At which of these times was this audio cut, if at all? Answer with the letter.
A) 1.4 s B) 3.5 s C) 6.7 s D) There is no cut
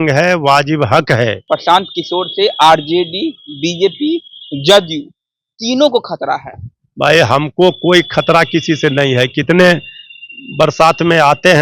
A